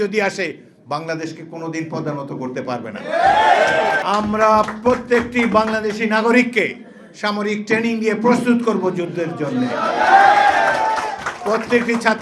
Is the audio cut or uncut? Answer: cut